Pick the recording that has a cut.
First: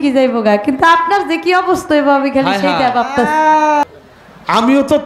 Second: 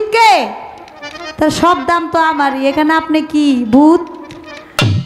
first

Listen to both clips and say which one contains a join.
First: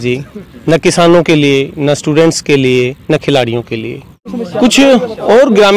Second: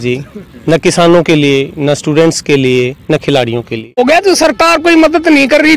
second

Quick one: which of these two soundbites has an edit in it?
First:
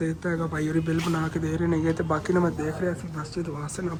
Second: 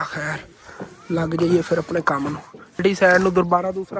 second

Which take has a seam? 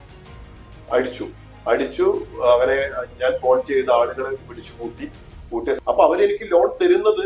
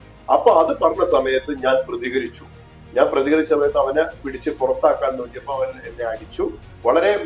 first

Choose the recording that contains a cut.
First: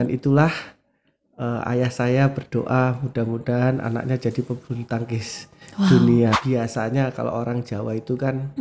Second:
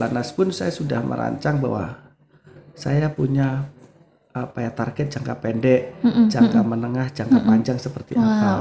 first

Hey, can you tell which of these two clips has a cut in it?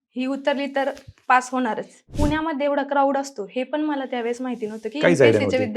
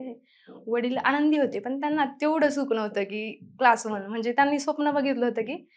first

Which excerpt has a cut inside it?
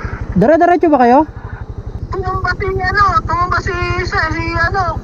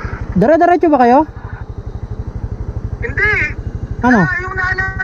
first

